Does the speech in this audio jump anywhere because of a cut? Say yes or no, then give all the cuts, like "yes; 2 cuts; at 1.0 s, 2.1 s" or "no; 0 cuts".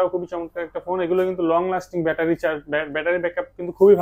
no; 0 cuts